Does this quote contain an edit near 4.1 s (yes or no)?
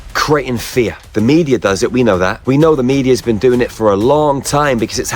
no